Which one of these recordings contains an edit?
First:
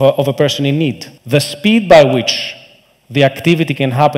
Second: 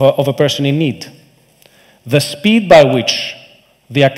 first; 1 cut; at 1.1 s

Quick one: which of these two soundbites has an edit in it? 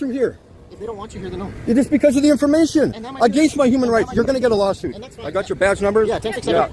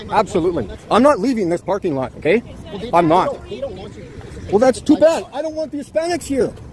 second; 1 cut; at 1.2 s

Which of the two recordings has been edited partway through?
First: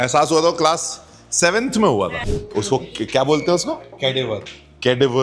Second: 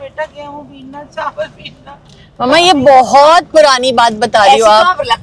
first; 1 cut; at 2.2 s

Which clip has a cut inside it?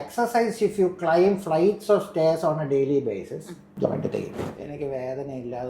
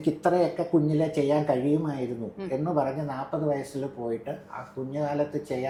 first; 2 cuts; at 3.6 s, 4.4 s

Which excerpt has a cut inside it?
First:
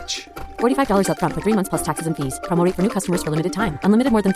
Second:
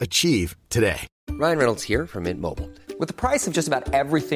second; 1 cut; at 1.1 s

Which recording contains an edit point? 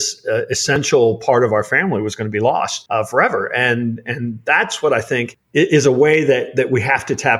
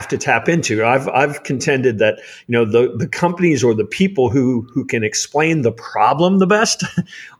first; 2 cuts; at 2.8 s, 5.4 s

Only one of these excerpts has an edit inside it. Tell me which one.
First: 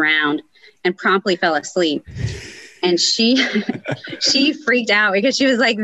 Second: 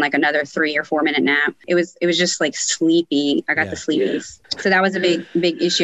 second; 2 cuts; at 1.5 s, 4.5 s

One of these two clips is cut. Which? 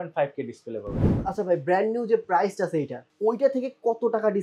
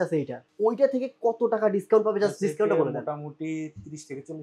first; 1 cut; at 1.1 s

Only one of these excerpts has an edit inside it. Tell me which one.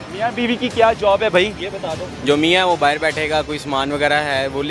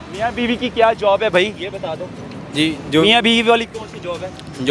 first; 1 cut; at 2.1 s

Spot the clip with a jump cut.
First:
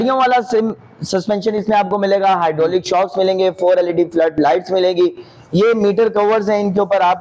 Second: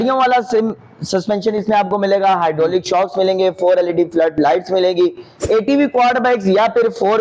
second; 1 cut; at 5.3 s

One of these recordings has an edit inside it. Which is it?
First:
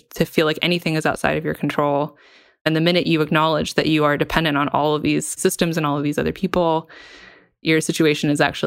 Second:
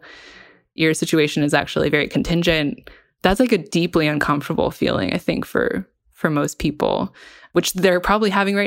second; 1 cut; at 7.5 s

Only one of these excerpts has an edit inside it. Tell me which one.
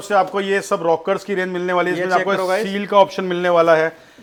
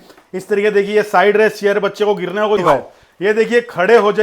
second; 1 cut; at 2.6 s

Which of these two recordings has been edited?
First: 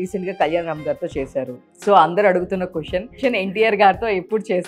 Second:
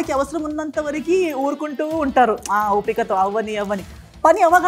first; 1 cut; at 3.2 s

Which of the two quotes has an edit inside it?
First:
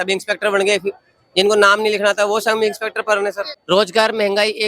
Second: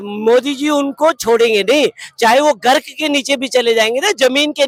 first; 1 cut; at 3.5 s

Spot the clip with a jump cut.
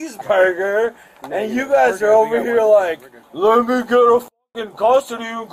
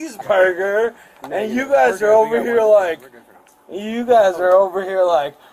first; 1 cut; at 3.2 s

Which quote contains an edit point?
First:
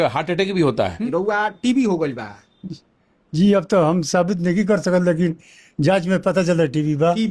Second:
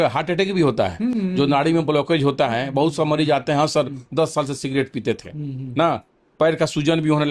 first; 1 cut; at 1.1 s

